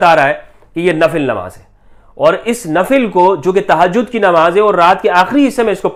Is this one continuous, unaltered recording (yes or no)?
yes